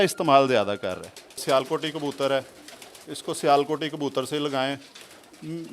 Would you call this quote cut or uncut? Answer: cut